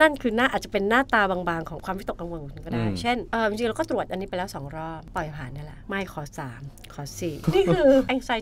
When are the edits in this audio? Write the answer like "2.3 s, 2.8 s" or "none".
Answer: 7.4 s